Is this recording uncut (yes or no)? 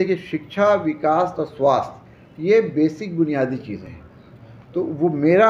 yes